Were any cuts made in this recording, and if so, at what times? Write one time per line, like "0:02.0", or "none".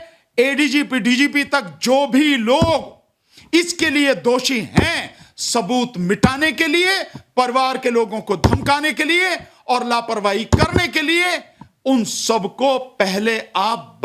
none